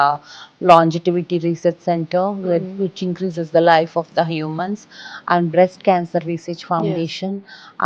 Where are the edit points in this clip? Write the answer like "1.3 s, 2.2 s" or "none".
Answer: none